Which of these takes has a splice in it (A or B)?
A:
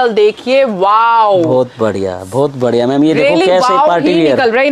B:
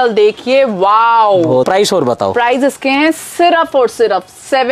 B